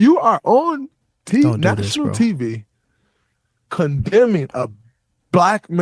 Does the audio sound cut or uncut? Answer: uncut